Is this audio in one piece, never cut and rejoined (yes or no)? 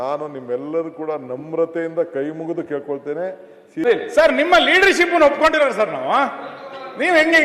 no